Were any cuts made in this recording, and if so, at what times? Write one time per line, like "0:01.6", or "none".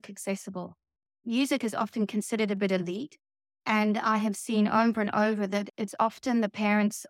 0:01.2